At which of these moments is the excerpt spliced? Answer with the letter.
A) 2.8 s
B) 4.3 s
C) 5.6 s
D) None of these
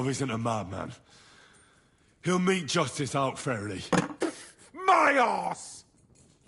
C